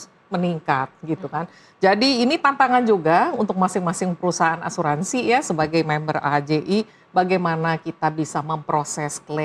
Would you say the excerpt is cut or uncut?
uncut